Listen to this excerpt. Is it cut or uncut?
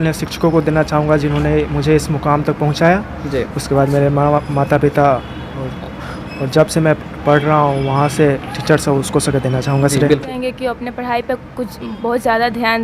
cut